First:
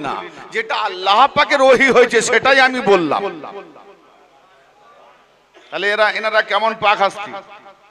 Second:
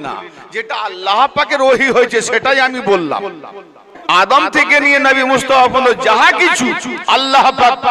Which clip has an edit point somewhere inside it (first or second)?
second